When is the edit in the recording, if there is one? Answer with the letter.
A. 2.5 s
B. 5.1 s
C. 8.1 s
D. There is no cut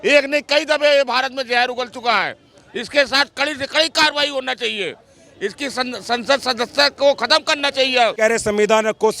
C